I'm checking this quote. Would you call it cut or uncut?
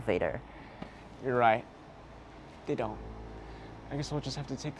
uncut